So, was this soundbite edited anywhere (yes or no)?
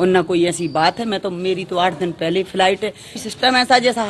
yes